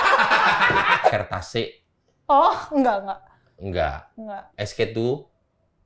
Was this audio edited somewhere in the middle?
yes; 1 cut; at 1.1 s

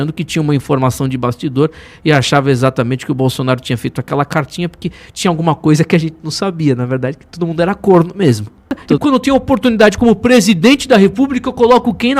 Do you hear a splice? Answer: yes; 1 cut; at 8.9 s

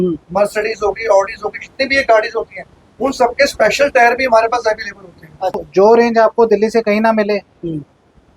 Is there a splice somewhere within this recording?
yes; 1 cut; at 5.6 s

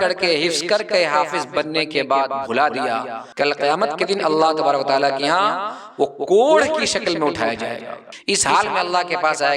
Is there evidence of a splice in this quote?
yes; 2 cuts; at 3.2 s, 8.1 s

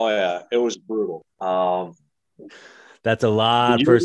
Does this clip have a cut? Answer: no; 0 cuts

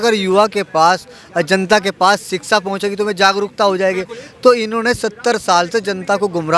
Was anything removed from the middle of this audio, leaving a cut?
no; 0 cuts

